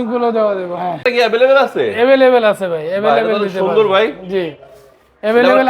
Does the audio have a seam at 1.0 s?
yes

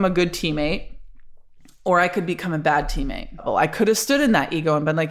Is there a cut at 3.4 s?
yes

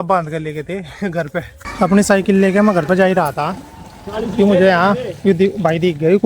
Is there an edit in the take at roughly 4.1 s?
no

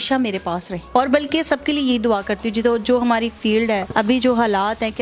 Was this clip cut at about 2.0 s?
no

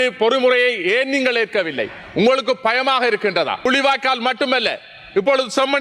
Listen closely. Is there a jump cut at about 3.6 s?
yes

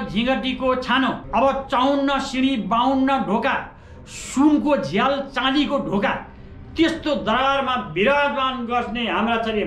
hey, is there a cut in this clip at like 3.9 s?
no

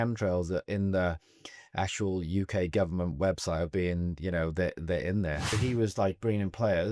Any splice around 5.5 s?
yes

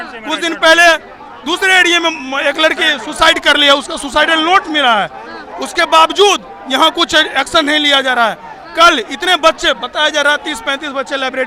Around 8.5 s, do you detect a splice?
no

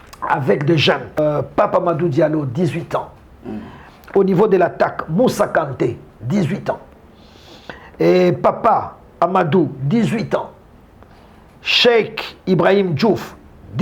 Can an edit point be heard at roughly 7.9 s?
no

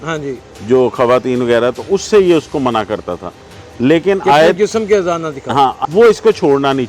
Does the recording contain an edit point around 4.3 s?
no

